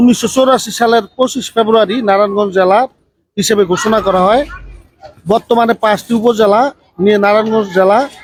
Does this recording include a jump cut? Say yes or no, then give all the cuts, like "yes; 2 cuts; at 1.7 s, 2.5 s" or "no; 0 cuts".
no; 0 cuts